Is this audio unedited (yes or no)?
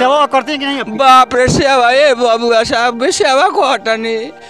yes